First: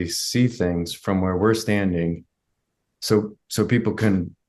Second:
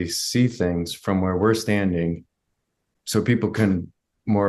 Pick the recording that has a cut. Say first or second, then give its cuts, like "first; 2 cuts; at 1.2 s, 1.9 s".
second; 1 cut; at 2.9 s